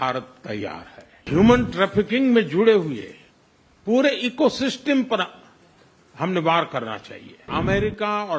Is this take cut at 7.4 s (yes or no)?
yes